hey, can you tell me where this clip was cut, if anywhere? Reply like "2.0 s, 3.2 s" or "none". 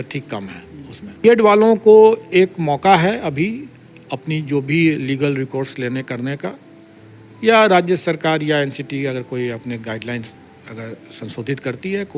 1.2 s